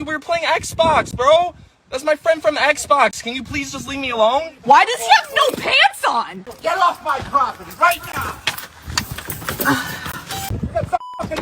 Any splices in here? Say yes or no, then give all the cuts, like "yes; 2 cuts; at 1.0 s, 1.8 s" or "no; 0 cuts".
yes; 2 cuts; at 6.4 s, 10.5 s